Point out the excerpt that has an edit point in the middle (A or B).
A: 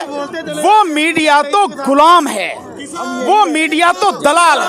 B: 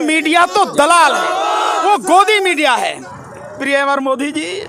B